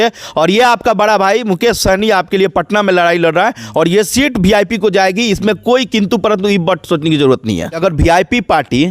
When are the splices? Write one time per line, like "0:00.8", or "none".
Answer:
0:07.8